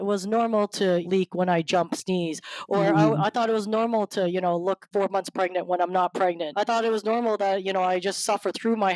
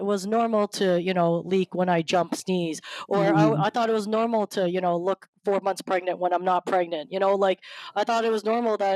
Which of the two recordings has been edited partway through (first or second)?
first